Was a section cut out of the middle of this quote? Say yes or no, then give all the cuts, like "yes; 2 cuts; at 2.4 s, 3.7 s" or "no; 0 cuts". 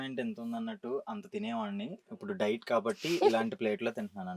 no; 0 cuts